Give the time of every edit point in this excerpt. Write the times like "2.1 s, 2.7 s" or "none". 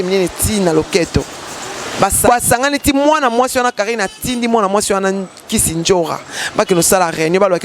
2.3 s